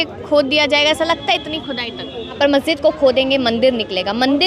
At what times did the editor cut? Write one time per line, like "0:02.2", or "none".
0:02.3